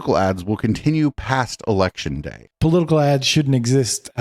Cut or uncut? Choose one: cut